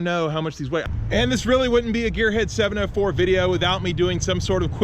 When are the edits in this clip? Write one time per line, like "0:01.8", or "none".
0:01.0